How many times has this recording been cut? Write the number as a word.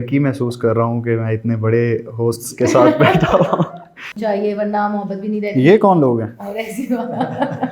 one